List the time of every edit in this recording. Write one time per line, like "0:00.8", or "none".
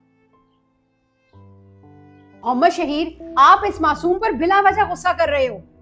0:02.5